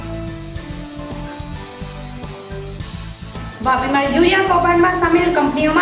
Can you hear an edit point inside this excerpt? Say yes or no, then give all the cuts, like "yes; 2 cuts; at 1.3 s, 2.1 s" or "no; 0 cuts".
yes; 1 cut; at 2.2 s